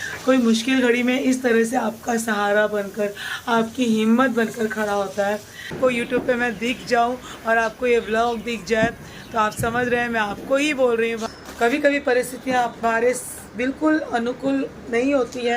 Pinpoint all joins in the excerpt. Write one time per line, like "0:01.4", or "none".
0:05.7
0:11.2